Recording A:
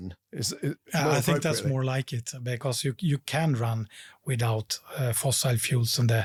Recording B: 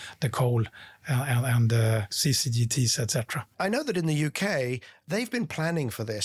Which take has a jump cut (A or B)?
B